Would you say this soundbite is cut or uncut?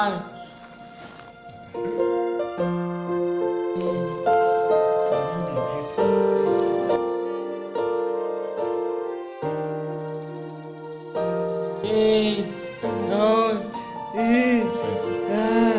uncut